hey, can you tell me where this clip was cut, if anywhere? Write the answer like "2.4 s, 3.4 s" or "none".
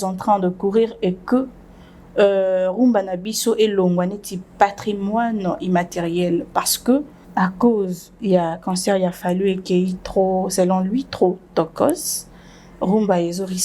7.2 s